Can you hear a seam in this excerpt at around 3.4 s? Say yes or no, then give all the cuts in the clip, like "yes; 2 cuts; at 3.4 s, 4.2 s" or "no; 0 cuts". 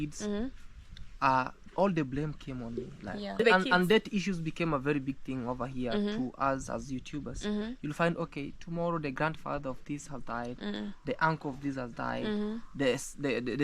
yes; 1 cut; at 3.4 s